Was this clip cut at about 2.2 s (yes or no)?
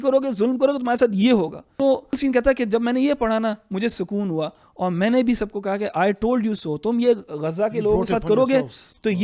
yes